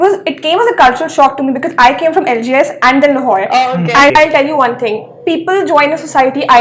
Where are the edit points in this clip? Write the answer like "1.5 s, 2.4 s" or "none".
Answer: 4.1 s